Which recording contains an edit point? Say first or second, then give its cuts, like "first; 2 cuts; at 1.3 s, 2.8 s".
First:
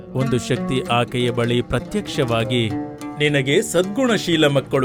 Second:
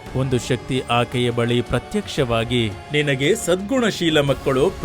second; 1 cut; at 2.8 s